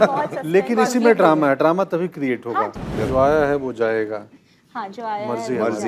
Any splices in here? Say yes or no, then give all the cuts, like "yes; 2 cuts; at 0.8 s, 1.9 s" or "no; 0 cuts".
yes; 1 cut; at 2.8 s